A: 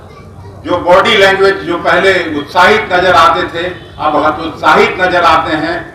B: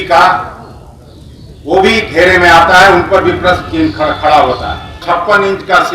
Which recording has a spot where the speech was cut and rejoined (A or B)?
B